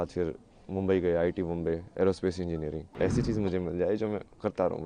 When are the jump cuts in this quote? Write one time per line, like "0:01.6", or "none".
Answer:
0:02.9